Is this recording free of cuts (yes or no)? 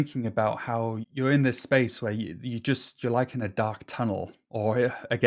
no